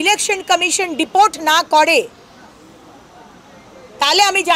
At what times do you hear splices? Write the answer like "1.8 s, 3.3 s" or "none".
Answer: none